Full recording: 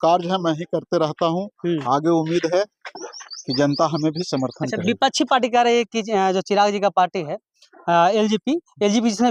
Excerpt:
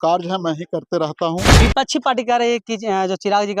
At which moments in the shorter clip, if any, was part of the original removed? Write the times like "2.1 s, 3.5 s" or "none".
1.5 s